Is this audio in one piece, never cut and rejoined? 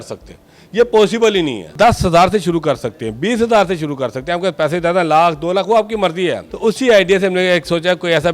no; 2 cuts; at 1.7 s, 6.5 s

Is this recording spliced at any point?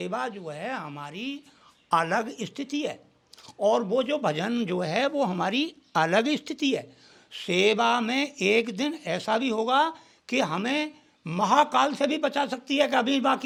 no; 0 cuts

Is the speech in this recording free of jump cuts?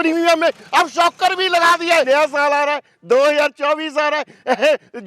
no; 1 cut; at 2.1 s

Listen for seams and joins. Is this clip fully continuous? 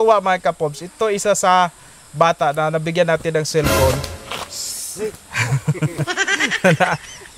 yes; 0 cuts

